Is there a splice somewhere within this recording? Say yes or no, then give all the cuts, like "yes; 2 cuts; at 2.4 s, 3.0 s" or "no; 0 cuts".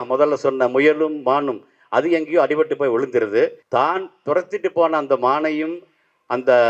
yes; 1 cut; at 3.6 s